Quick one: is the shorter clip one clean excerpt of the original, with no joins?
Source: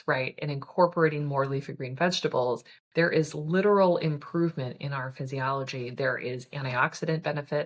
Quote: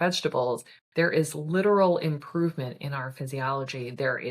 yes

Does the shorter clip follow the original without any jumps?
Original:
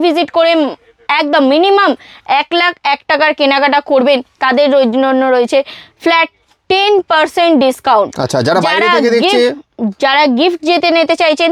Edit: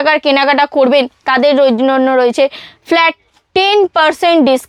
yes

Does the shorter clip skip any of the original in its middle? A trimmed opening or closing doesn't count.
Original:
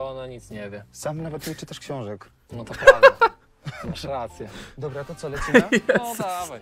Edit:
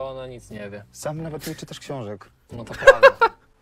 no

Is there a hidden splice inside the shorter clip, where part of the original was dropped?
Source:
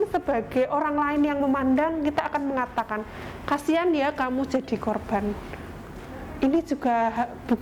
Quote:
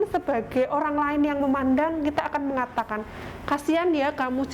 no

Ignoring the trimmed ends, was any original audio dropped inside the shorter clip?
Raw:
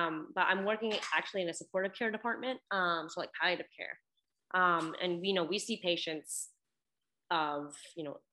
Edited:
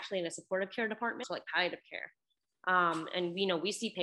yes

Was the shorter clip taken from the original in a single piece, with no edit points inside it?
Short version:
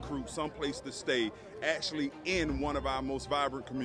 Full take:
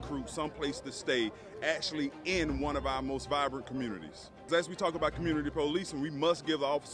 yes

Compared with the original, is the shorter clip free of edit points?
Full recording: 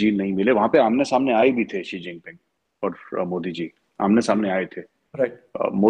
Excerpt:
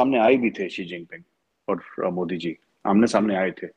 yes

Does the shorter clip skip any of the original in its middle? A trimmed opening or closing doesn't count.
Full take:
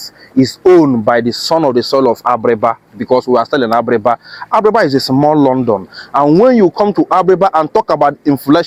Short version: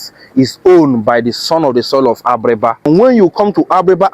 yes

